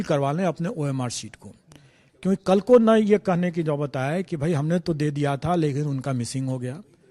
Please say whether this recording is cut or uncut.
uncut